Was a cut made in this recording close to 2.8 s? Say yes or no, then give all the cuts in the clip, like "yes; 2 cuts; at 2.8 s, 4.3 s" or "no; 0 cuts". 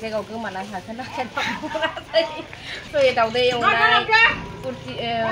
yes; 1 cut; at 2.8 s